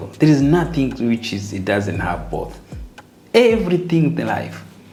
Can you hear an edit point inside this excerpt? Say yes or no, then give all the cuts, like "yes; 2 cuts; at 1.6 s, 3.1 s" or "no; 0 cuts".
no; 0 cuts